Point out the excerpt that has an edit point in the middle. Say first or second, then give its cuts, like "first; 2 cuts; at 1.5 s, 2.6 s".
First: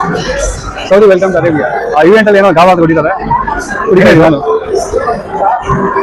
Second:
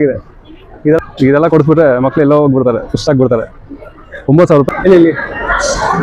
second; 1 cut; at 4.7 s